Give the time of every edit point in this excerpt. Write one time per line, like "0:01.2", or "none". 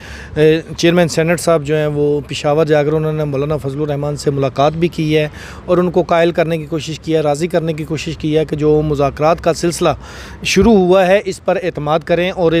none